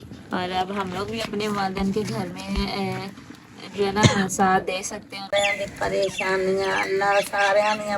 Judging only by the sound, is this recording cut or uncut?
cut